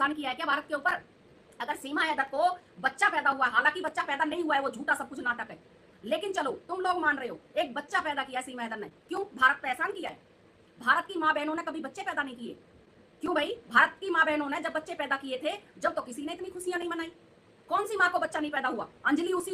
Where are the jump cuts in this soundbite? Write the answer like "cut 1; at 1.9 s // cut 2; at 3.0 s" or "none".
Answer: none